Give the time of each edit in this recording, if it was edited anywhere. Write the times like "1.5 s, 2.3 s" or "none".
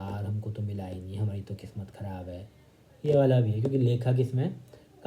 none